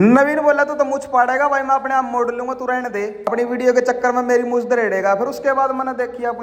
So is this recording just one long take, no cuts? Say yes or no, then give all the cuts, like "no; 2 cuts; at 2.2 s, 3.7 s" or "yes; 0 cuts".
yes; 0 cuts